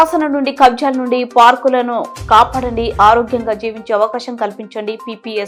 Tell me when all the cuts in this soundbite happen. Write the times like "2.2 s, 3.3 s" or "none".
none